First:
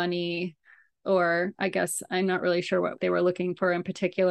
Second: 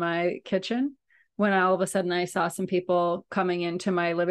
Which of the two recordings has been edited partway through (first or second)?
first